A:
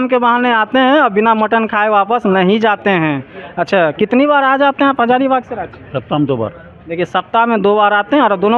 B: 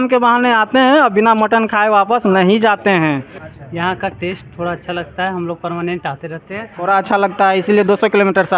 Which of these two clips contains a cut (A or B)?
B